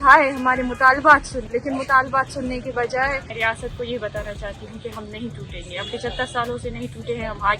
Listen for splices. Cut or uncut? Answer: cut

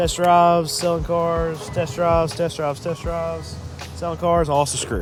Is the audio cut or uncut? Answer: uncut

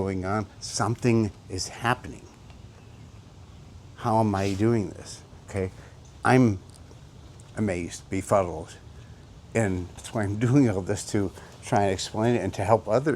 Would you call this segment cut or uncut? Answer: cut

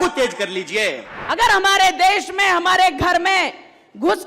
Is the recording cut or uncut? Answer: cut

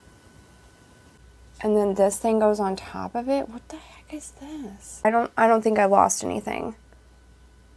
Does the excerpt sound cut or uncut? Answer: cut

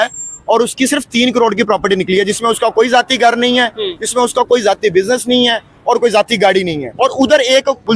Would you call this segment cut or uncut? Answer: cut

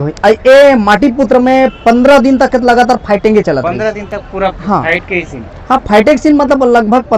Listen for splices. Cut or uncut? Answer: uncut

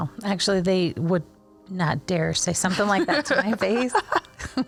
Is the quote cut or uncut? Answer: uncut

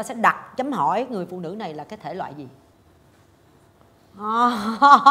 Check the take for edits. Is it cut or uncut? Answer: cut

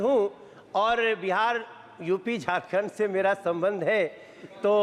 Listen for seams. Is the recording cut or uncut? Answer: uncut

